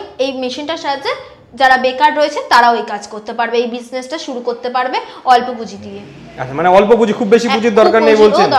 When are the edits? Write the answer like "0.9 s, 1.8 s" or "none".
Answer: none